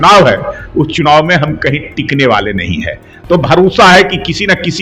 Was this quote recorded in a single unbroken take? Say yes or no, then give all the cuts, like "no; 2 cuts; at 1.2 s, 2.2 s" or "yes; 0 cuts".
yes; 0 cuts